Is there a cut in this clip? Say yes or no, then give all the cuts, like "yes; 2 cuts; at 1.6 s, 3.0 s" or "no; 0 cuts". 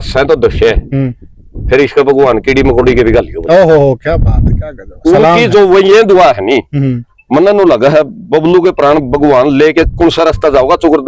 no; 0 cuts